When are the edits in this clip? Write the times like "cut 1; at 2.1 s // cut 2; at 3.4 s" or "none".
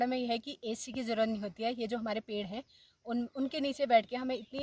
none